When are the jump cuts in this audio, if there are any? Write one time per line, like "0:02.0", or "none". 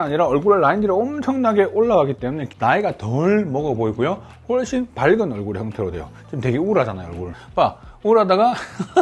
0:02.4
0:07.4